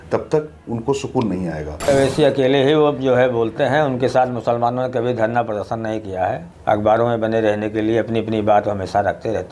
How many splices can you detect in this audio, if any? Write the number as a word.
two